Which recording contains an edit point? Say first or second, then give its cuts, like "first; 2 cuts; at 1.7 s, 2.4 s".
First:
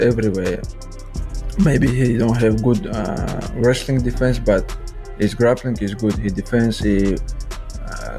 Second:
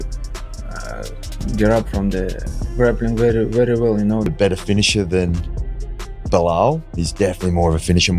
second; 1 cut; at 4.3 s